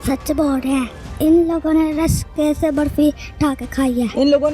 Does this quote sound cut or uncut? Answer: cut